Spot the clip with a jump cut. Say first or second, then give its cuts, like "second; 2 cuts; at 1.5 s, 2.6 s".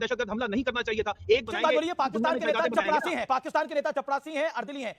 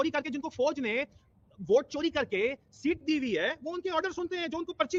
first; 1 cut; at 1.4 s